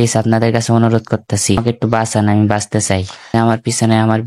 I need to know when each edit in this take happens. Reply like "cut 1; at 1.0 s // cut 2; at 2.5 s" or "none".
cut 1; at 1.6 s // cut 2; at 3.2 s